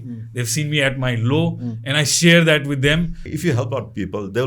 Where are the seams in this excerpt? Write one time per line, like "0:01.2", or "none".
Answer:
0:03.2